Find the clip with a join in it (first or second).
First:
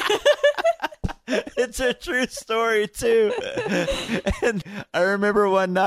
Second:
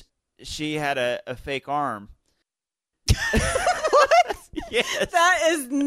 first